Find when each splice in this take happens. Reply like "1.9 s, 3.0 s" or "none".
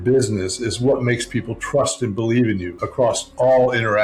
2.8 s